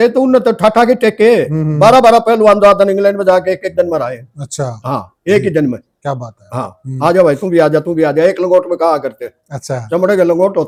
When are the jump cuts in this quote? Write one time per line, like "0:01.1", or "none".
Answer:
none